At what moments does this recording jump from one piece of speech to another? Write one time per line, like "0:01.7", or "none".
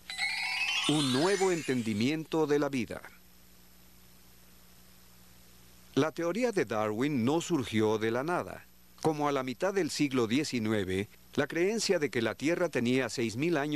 none